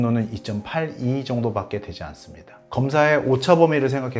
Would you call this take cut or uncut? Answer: cut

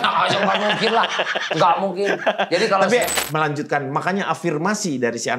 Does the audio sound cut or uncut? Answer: cut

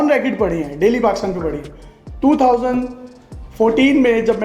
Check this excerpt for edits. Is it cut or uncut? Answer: uncut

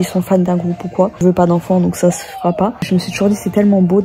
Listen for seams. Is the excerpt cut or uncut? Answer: cut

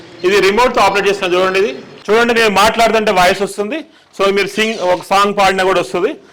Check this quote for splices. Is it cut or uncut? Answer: cut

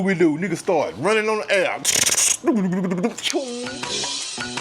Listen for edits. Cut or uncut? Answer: cut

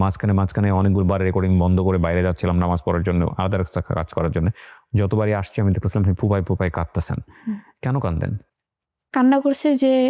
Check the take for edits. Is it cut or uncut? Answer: uncut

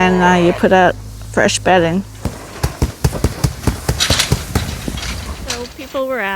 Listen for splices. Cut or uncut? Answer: cut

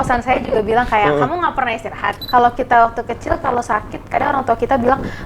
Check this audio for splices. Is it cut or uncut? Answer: cut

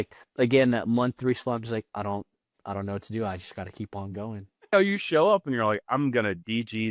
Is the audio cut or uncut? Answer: cut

